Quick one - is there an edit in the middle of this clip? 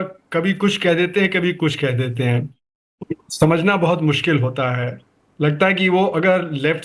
no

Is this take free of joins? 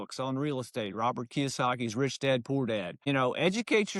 no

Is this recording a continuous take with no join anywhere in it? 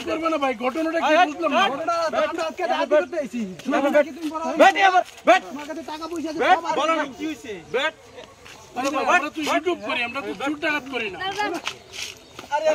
yes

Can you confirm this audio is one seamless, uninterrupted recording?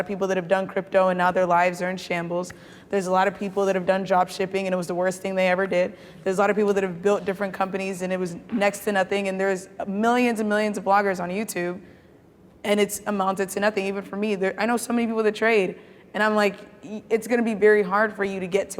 yes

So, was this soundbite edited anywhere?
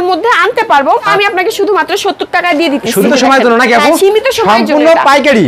yes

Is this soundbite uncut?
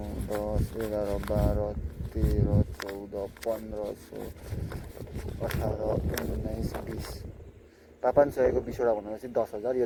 yes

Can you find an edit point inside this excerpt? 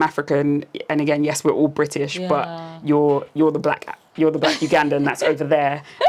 no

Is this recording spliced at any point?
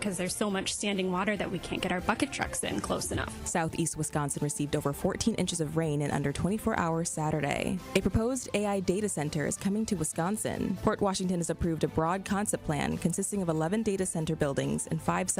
no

